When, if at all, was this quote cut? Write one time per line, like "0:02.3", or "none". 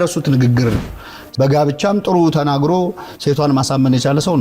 0:00.9